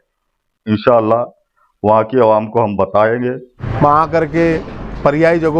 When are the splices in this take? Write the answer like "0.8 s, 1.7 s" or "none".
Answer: 3.6 s